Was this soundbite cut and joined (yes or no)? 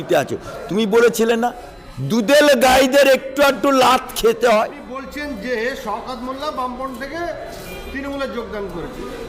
yes